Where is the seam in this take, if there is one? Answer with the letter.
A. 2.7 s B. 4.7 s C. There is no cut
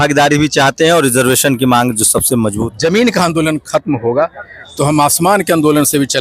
A